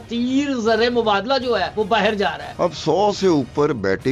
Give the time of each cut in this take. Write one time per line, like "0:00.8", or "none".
0:01.7
0:02.5